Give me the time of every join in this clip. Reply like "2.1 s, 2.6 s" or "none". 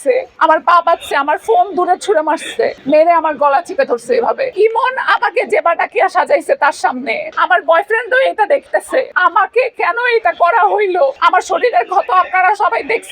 4.5 s, 7.3 s, 9.1 s, 11.2 s